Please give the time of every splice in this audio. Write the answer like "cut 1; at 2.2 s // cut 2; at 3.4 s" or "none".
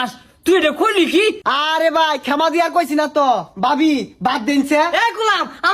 cut 1; at 1.5 s